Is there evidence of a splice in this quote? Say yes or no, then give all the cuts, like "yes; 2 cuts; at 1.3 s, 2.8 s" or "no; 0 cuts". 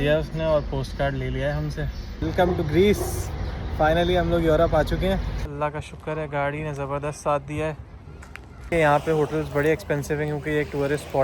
yes; 3 cuts; at 2.2 s, 5.4 s, 8.7 s